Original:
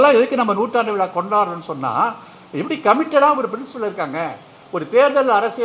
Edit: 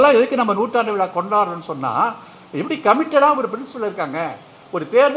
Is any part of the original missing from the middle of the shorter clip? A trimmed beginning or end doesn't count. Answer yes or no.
no